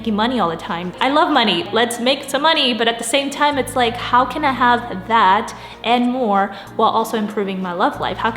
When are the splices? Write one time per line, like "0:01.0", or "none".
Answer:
0:00.9
0:01.7